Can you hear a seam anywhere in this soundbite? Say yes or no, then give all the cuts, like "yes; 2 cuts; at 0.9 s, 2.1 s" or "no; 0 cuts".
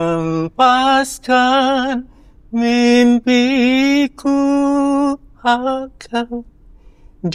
no; 0 cuts